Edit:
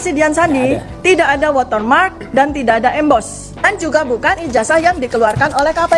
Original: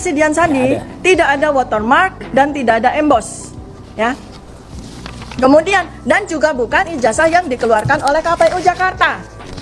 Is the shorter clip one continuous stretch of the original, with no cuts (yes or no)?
no